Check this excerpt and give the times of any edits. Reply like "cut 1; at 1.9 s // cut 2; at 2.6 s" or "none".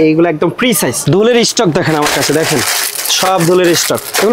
cut 1; at 1.0 s